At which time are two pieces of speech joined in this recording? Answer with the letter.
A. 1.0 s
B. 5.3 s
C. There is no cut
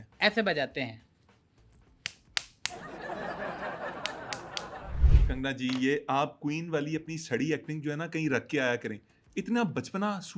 B